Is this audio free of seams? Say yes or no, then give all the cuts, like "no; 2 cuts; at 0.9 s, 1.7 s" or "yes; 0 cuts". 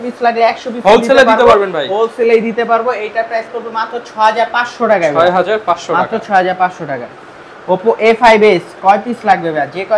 yes; 0 cuts